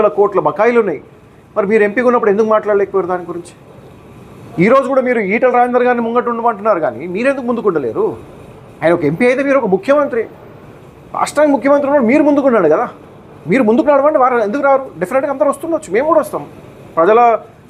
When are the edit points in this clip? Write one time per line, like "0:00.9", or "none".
none